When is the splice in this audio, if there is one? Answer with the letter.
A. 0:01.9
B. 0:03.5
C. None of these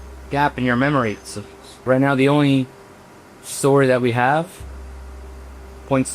A